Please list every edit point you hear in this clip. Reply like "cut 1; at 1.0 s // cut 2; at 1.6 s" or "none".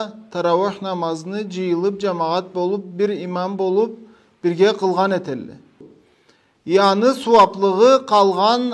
cut 1; at 5.9 s